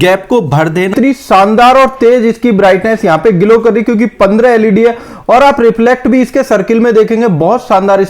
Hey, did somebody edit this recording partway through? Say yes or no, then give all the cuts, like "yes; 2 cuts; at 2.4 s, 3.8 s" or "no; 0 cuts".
yes; 1 cut; at 0.9 s